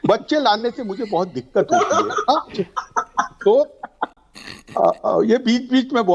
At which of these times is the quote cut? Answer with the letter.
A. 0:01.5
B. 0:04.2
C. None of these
B